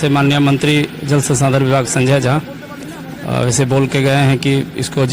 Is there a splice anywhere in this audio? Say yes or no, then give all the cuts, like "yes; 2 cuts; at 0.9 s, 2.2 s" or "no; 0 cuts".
no; 0 cuts